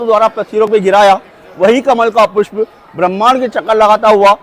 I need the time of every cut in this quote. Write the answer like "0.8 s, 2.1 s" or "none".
none